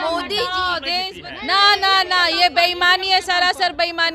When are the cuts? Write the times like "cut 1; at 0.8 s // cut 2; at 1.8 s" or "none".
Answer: cut 1; at 1.0 s

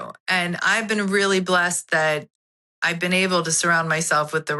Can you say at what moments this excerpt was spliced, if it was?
none

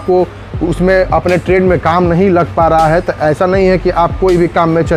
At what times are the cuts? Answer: none

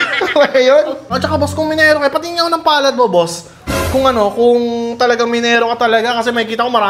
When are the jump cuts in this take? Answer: cut 1; at 1.0 s

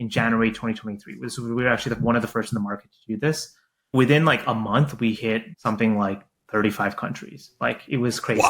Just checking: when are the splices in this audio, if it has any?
cut 1; at 3.9 s // cut 2; at 5.5 s

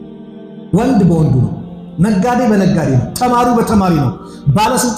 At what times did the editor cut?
none

